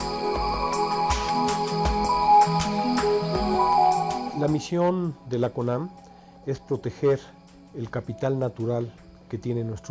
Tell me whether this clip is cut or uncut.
uncut